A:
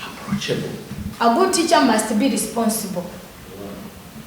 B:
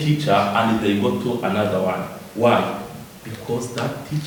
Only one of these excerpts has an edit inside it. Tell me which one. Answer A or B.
A